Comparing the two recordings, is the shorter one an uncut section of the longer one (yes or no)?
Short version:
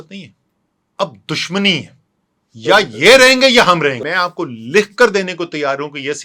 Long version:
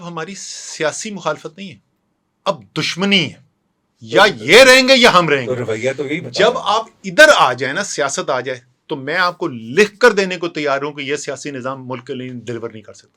no